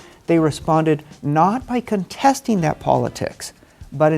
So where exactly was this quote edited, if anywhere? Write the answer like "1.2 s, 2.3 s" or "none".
none